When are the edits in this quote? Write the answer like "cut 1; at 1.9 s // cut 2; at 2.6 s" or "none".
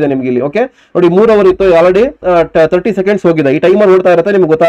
none